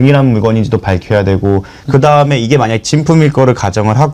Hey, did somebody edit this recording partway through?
no; 0 cuts

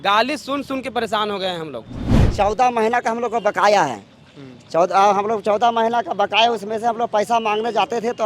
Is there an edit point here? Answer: yes; 1 cut; at 2.2 s

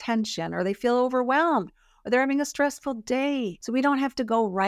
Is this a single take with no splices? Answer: no; 1 cut; at 3.6 s

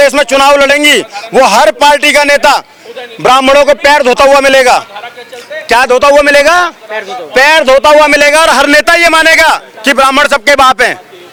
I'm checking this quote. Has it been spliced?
no; 0 cuts

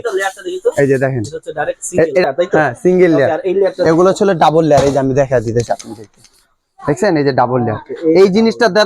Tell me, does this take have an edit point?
yes; 1 cut; at 2.2 s

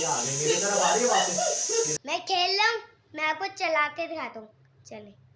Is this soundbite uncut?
no; 1 cut; at 2.0 s

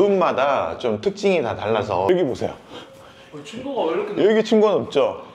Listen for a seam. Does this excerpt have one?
yes; 1 cut; at 2.1 s

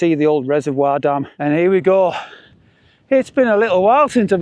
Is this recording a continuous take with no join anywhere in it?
no; 1 cut; at 1.3 s

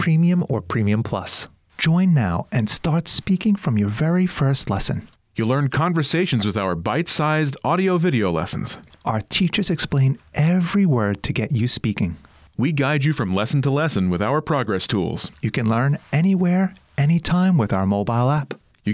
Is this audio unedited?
no; 1 cut; at 1.4 s

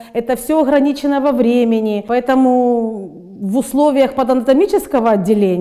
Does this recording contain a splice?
yes; 1 cut; at 2.0 s

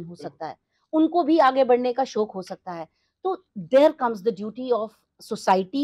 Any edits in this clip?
no; 0 cuts

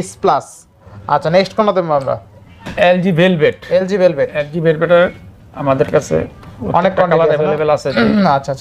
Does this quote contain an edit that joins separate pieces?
no; 0 cuts

